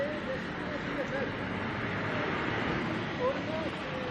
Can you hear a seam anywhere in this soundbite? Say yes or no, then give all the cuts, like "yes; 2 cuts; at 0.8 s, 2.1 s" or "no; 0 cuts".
no; 0 cuts